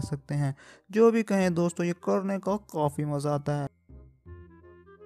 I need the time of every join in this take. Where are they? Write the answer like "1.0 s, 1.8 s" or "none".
4.0 s